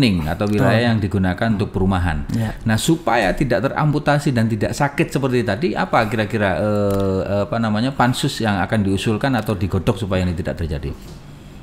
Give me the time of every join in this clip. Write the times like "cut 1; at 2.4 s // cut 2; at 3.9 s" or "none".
none